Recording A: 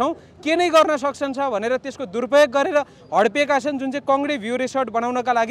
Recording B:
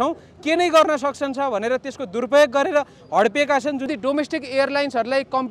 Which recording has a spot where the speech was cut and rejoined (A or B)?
B